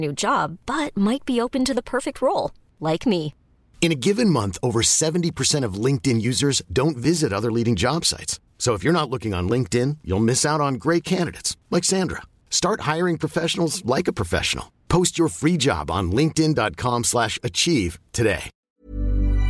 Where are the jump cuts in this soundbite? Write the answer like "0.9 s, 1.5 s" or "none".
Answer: 18.5 s